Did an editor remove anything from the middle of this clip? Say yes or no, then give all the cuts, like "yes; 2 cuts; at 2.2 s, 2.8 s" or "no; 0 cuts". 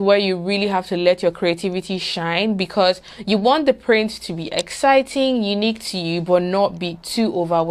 no; 0 cuts